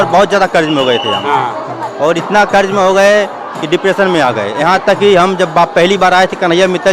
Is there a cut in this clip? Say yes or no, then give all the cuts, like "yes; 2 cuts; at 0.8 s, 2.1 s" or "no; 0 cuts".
no; 0 cuts